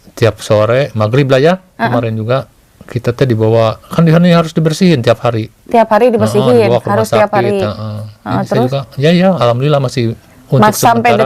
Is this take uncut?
yes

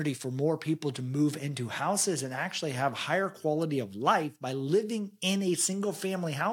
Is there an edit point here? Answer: no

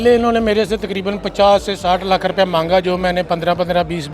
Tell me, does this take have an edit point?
no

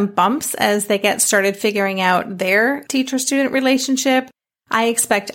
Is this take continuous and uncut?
no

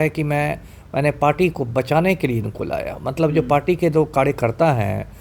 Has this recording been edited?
no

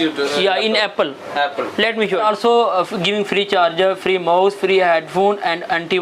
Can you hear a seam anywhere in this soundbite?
yes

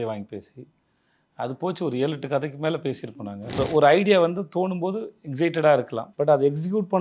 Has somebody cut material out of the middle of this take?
yes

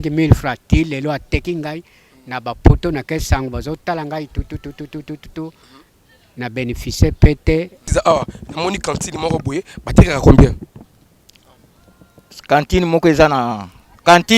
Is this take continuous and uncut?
no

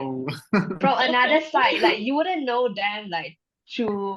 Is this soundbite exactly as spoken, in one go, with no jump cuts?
yes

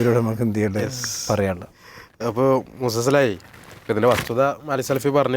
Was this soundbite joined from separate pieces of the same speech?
no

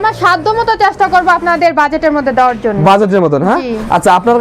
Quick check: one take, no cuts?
yes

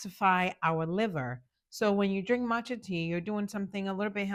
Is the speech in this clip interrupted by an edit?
no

